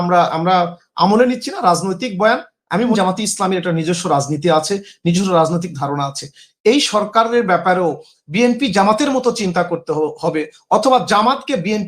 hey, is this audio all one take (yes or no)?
no